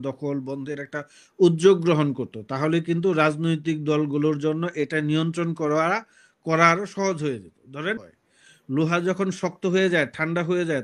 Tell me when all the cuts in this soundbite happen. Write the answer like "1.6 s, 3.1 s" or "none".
8.0 s